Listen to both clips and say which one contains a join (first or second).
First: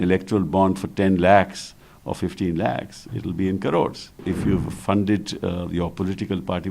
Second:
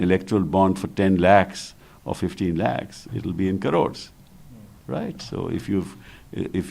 first